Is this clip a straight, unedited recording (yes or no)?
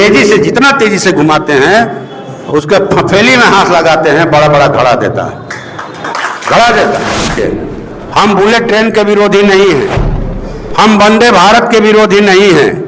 no